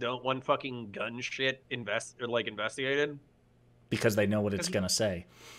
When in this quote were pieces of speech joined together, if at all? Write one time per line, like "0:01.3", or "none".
none